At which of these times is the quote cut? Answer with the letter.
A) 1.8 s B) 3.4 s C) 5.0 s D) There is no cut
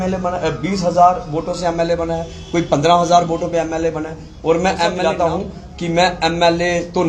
C